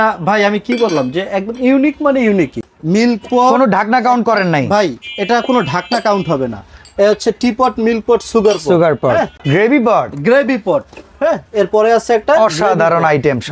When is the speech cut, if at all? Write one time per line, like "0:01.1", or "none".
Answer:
0:02.7
0:09.4